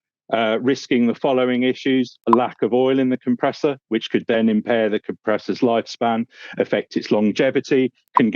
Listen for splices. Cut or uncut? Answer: uncut